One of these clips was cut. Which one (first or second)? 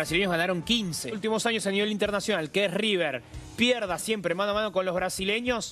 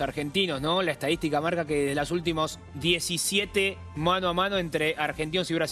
first